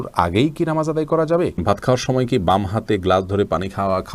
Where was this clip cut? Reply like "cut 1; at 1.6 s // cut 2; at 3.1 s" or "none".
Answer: cut 1; at 1.6 s